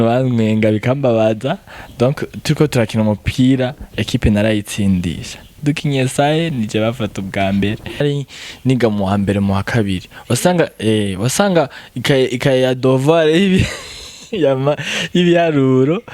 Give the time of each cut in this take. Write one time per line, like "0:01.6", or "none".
0:08.0